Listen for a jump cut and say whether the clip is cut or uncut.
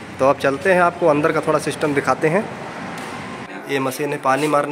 cut